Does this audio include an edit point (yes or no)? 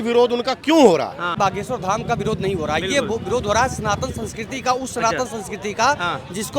yes